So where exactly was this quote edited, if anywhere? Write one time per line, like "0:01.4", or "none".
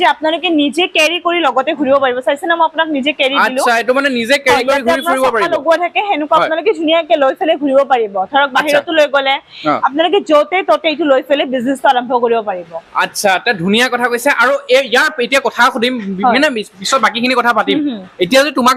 none